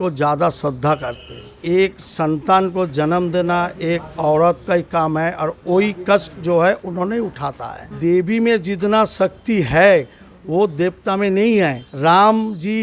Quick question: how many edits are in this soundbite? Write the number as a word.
three